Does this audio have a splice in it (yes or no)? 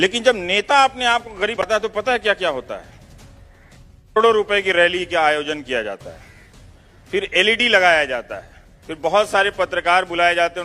yes